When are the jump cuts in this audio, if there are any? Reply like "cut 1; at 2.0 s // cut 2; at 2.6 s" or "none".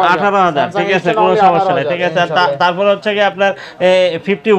none